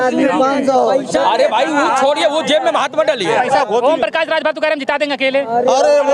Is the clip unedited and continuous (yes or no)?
no